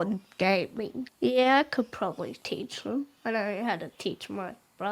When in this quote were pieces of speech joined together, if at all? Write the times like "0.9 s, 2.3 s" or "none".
none